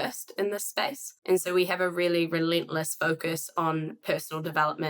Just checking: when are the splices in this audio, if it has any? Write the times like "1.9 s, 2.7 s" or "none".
1.1 s